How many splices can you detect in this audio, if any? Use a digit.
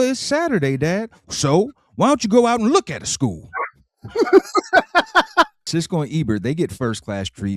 1